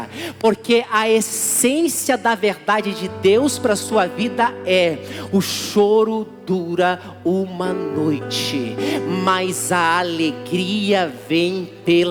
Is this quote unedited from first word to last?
yes; 0 cuts

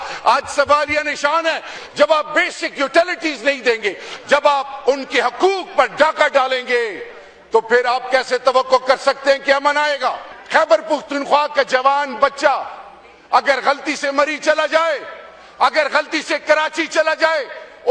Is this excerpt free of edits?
no; 2 cuts; at 1.8 s, 10.3 s

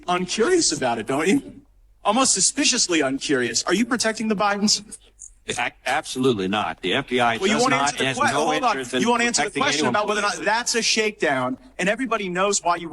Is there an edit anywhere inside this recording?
no; 0 cuts

